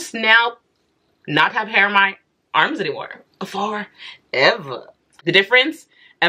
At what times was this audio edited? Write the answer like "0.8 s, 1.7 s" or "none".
5.2 s